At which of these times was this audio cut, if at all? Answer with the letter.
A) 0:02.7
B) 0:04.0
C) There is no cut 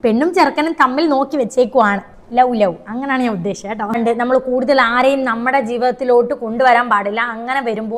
B